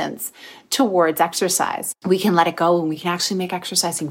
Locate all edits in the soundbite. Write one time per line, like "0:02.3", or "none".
0:01.9
0:03.0